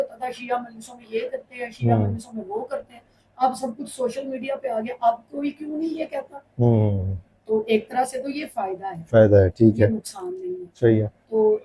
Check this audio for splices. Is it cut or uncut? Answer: uncut